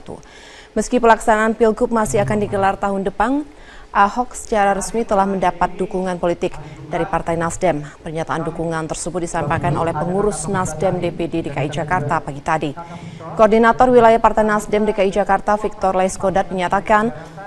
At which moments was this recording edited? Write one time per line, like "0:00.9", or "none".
0:16.1